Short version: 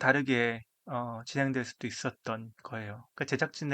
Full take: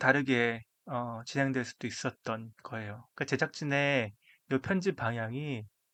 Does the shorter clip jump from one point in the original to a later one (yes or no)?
no